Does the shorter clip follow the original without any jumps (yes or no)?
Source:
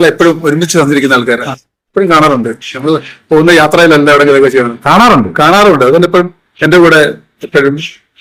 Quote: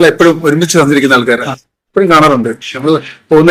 yes